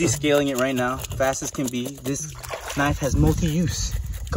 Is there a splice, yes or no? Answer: no